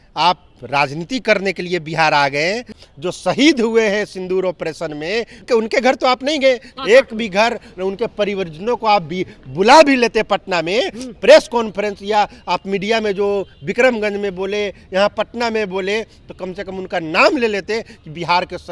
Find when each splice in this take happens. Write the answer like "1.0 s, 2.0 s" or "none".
2.8 s, 5.4 s, 6.7 s